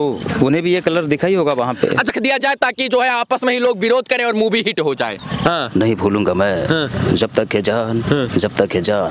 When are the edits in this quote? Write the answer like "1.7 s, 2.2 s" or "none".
2.1 s, 5.4 s